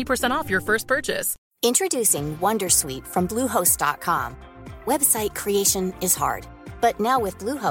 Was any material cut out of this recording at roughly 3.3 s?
no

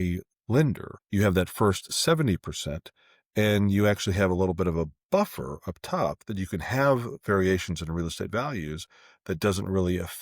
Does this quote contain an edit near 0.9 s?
yes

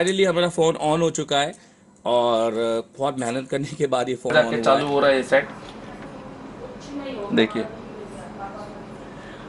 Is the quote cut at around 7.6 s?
no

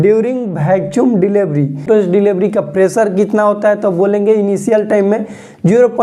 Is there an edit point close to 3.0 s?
no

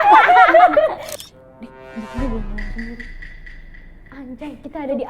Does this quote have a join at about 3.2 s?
no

